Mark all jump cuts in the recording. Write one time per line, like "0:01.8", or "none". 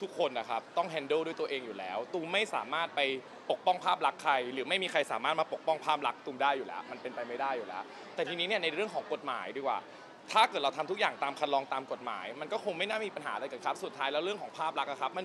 none